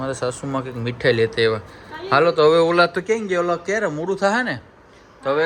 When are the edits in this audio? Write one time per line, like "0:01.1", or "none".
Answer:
none